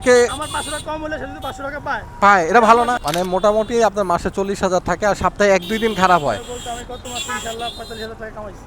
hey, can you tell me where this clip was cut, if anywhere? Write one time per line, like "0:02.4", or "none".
0:03.0